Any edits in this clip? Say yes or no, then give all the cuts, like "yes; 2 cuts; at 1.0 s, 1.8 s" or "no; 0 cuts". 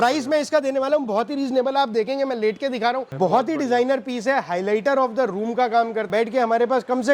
yes; 2 cuts; at 3.1 s, 6.1 s